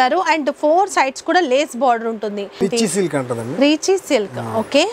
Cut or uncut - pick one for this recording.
cut